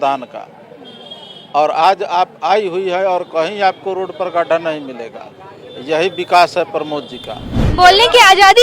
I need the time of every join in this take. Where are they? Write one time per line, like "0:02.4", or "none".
0:07.6